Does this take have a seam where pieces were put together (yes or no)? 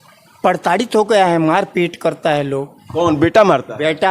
no